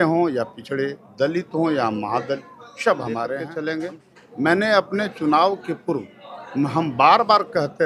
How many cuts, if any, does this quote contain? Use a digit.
1